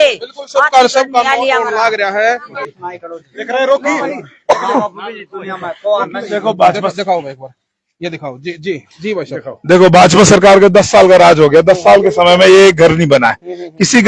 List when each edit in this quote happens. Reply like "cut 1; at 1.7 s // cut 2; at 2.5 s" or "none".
cut 1; at 2.5 s